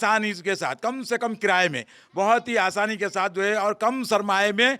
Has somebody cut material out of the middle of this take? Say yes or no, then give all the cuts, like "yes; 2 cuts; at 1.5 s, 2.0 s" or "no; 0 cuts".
no; 0 cuts